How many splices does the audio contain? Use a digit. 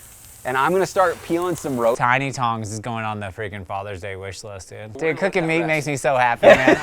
2